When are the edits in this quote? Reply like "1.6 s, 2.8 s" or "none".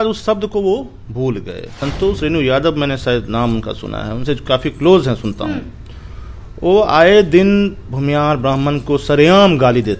1.8 s

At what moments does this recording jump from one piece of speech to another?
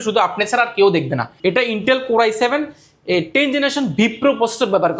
1.3 s

